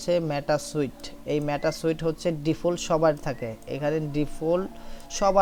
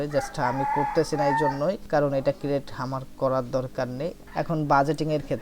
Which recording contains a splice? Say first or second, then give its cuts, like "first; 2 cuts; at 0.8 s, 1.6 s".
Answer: second; 1 cut; at 4.2 s